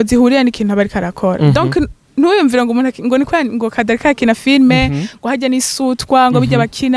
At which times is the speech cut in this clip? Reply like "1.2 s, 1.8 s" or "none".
none